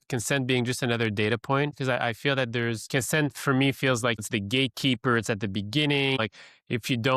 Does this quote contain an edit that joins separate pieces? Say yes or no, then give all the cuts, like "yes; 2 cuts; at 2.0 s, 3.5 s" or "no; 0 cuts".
yes; 4 cuts; at 1.7 s, 2.9 s, 4.2 s, 6.2 s